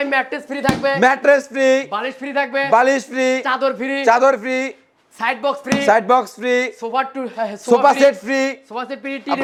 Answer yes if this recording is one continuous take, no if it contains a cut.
yes